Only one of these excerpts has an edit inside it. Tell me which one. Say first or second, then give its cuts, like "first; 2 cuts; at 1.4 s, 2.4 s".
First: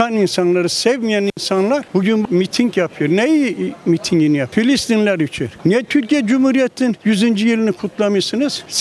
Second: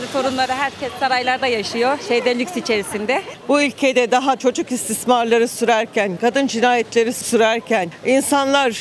second; 1 cut; at 3.4 s